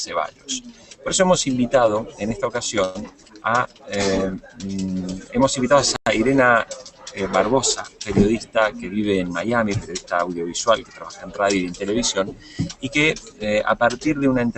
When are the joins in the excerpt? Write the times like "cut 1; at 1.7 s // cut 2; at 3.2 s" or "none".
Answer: cut 1; at 7.7 s